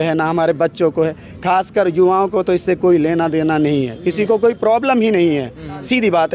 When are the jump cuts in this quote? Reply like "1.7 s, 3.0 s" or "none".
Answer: none

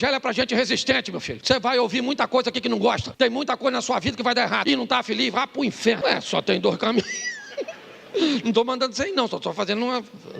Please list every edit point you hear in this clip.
1.3 s, 3.1 s, 4.6 s, 6.0 s

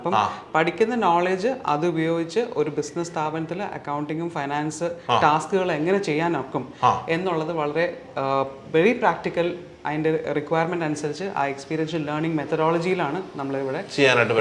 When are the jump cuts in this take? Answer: none

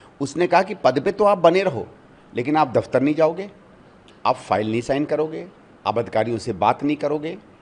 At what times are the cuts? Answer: none

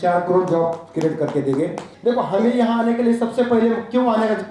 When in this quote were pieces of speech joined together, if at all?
none

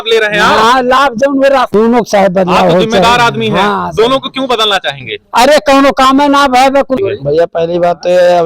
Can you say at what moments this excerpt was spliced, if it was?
1.7 s, 7.0 s

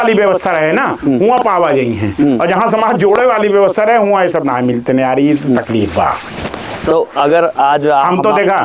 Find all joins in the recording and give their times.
none

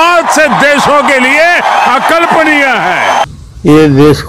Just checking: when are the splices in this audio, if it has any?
3.3 s

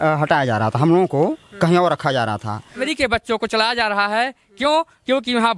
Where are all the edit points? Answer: 2.8 s

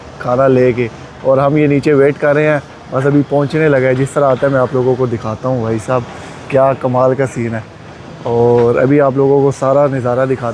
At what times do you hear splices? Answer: none

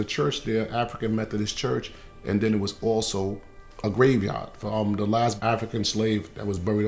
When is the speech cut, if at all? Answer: 4.5 s

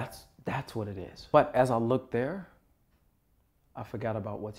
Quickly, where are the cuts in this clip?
1.1 s

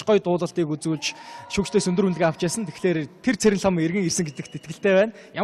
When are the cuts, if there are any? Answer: 3.5 s

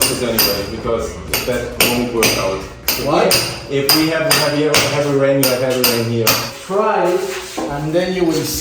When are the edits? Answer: 6.6 s

